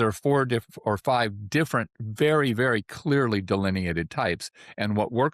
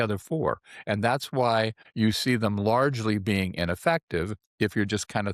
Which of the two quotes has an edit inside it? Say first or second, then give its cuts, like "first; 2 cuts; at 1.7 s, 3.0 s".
second; 2 cuts; at 1.8 s, 4.4 s